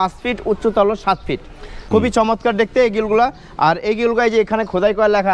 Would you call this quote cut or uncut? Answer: cut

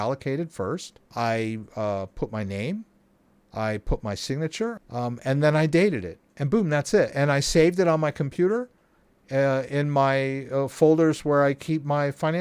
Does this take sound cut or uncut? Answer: cut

